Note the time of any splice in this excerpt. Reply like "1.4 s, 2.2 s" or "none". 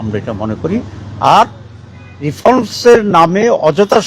none